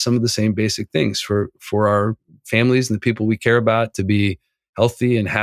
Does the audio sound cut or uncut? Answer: uncut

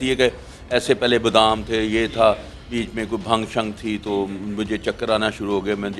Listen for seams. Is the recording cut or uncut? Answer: uncut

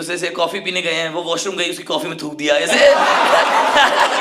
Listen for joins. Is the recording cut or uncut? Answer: uncut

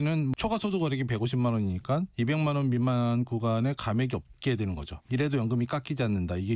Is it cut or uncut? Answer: uncut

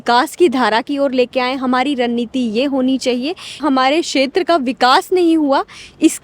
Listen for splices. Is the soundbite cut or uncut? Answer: cut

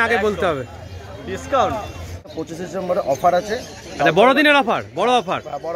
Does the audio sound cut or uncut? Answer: cut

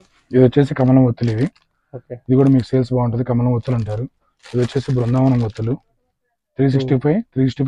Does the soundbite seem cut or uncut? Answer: uncut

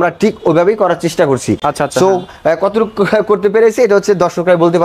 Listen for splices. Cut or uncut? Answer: uncut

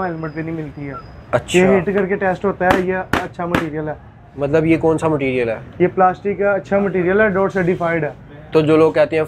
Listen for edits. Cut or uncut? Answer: uncut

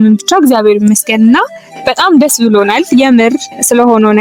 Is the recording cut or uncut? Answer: uncut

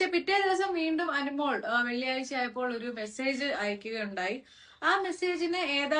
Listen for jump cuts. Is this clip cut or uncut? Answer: uncut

